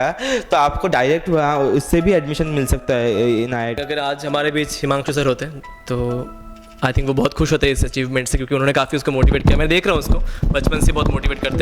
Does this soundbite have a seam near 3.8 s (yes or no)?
yes